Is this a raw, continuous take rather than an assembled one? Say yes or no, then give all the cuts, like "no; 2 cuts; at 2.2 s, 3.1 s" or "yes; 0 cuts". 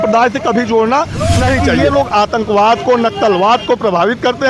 no; 1 cut; at 1.8 s